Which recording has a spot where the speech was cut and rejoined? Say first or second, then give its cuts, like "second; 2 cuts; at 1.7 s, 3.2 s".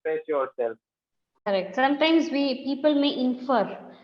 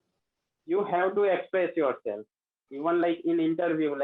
first; 1 cut; at 1.5 s